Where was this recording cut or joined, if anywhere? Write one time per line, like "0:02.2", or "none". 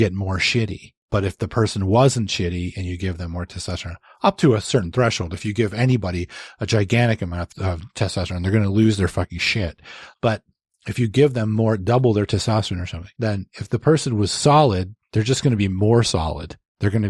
0:07.4